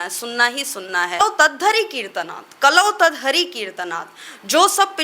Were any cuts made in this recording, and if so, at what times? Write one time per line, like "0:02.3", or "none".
0:01.2